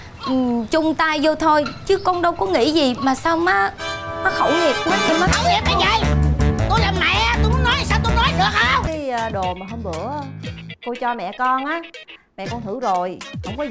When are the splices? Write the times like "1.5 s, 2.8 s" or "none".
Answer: 8.8 s